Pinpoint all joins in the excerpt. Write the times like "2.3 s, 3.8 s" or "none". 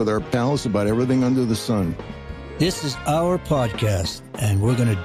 2.0 s